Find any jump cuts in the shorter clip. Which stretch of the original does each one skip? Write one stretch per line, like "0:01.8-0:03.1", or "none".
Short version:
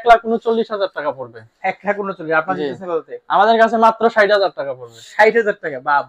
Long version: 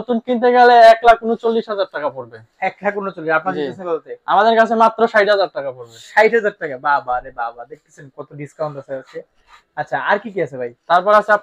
none